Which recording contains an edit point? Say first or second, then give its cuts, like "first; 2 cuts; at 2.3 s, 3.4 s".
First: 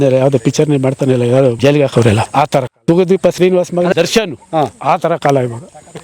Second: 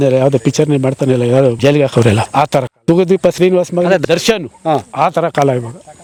first; 1 cut; at 3.9 s